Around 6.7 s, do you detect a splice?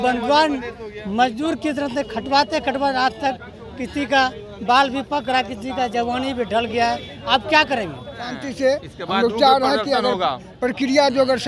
no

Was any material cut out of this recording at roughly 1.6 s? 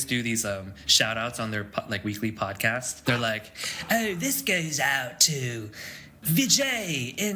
no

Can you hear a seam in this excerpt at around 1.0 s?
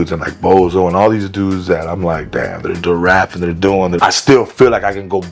no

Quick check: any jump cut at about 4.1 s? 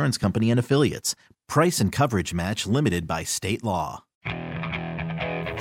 yes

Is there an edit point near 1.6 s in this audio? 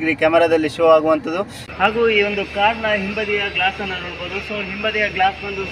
yes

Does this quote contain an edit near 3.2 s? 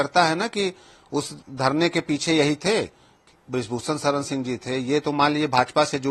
yes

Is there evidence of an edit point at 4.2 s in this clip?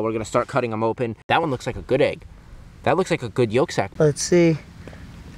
yes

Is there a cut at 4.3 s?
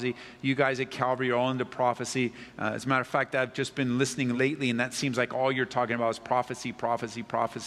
yes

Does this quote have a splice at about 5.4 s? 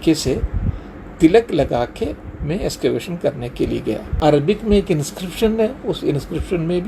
no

